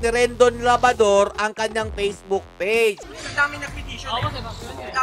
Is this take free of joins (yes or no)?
no